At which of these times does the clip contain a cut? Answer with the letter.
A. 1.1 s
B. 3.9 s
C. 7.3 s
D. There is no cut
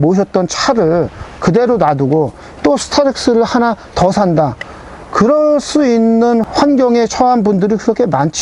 D